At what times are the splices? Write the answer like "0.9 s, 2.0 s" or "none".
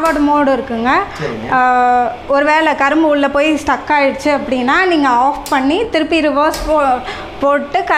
none